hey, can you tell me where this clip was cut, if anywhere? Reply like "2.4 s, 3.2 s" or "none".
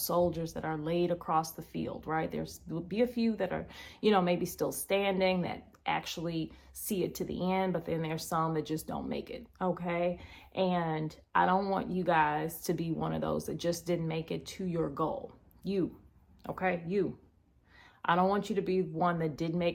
none